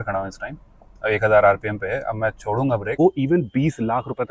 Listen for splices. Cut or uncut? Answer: cut